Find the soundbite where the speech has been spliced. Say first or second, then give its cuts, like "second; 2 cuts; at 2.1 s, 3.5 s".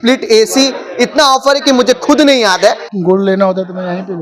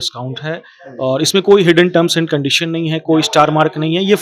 first; 1 cut; at 2.9 s